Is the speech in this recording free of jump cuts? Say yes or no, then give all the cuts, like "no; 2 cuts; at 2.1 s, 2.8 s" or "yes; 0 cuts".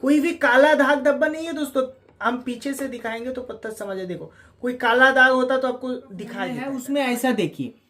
no; 1 cut; at 6.5 s